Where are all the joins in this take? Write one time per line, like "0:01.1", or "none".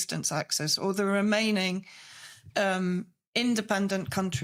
none